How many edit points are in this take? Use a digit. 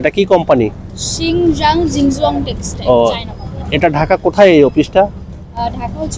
0